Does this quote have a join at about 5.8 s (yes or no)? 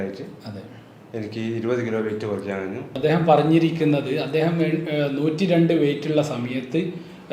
no